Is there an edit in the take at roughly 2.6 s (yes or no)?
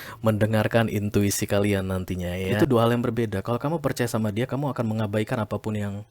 yes